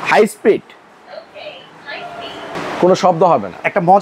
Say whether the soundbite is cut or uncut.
cut